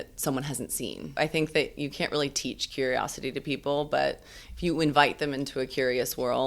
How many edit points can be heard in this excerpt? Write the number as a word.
one